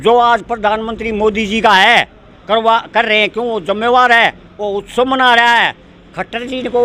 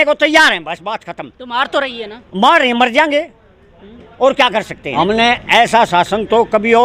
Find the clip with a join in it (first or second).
second